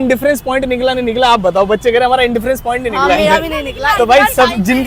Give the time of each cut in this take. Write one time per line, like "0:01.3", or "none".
none